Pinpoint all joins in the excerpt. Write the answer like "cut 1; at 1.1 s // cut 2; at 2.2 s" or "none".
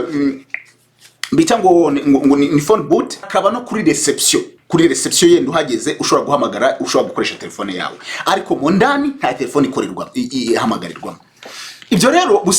cut 1; at 3.3 s